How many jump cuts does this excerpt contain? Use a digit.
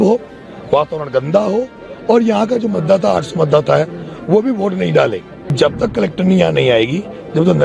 1